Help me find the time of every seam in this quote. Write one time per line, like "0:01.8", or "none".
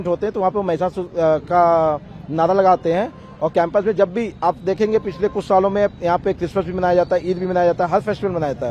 none